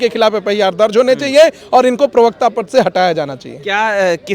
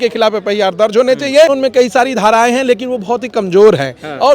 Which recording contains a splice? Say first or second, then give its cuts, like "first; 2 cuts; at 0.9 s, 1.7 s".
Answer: second; 1 cut; at 1.5 s